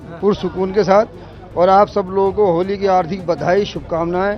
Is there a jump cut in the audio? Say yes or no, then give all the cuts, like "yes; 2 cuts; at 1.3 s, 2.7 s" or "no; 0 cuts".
no; 0 cuts